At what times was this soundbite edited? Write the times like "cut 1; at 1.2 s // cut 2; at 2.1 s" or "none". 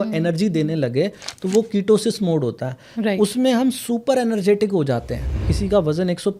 cut 1; at 5.4 s